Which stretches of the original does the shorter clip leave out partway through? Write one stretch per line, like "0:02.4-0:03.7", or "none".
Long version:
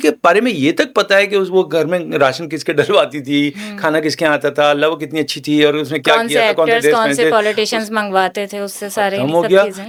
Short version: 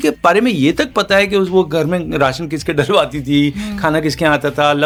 none